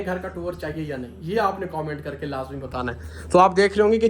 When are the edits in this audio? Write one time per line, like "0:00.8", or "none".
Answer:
0:01.3

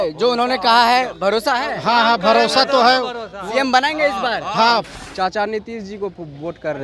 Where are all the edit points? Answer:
0:05.0

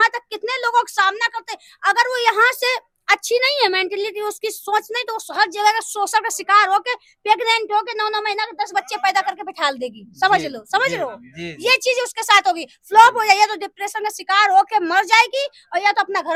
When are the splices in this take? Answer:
none

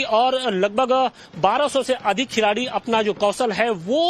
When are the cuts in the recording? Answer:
0:02.7

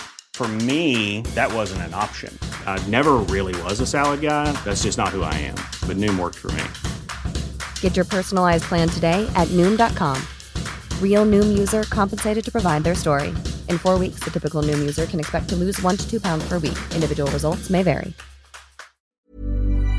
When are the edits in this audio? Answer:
0:19.0

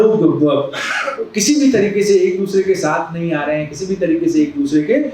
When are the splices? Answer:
none

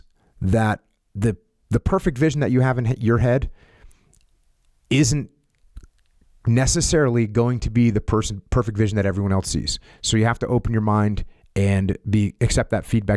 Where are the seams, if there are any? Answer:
none

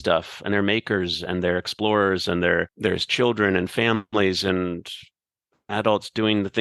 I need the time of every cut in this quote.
0:02.7

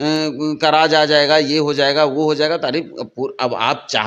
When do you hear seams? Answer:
none

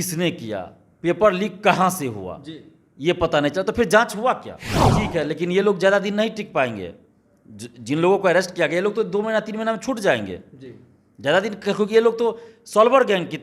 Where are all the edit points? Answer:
0:05.0

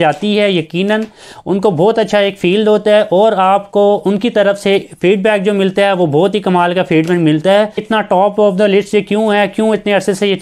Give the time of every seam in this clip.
0:07.9

